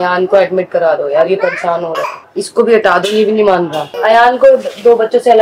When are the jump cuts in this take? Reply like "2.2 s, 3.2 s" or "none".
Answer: 2.2 s, 3.9 s